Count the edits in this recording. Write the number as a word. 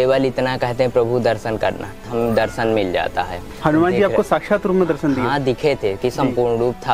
two